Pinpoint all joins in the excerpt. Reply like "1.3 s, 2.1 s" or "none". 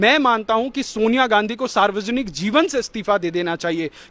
none